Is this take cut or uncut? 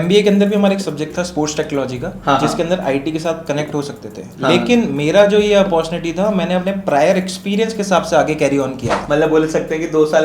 cut